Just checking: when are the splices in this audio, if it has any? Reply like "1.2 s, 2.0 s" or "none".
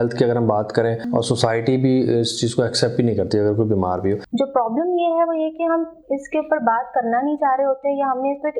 1.0 s, 4.3 s